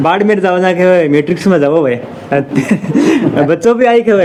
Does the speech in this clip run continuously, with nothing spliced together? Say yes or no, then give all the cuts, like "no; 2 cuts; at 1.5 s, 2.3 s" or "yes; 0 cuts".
yes; 0 cuts